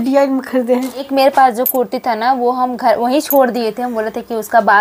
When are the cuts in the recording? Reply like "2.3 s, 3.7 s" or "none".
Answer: 1.0 s